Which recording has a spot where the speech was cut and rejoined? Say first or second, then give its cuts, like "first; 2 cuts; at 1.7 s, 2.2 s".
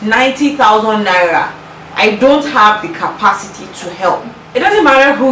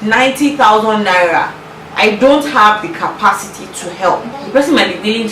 first; 1 cut; at 4.3 s